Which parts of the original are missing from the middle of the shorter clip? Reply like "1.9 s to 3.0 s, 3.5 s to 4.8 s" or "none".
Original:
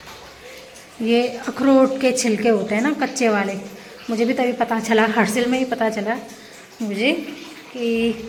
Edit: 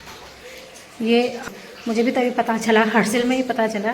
1.4 s to 3.7 s